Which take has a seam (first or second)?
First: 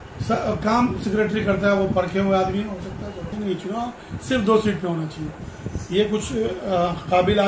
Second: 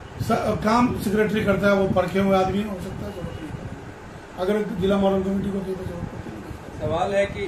first